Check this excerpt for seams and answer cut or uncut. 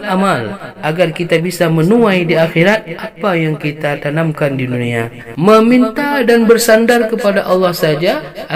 cut